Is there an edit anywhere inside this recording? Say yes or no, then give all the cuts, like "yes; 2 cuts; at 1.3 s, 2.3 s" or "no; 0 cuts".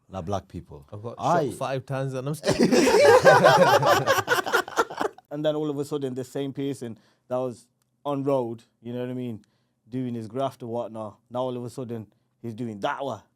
yes; 1 cut; at 5.2 s